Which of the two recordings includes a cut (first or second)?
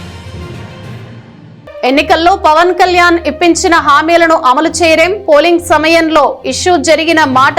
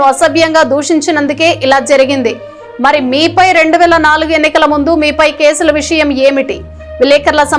first